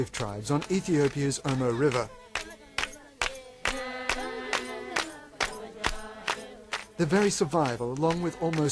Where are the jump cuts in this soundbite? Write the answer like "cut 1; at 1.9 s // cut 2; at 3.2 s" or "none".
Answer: cut 1; at 2.0 s